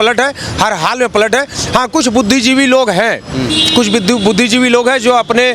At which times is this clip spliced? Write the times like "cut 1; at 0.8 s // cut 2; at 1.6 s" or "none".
none